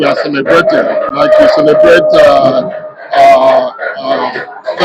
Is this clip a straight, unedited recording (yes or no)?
yes